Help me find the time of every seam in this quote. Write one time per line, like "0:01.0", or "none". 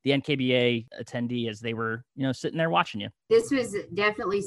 0:00.9
0:03.3